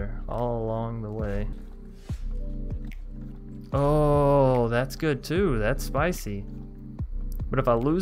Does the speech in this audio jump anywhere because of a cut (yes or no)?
yes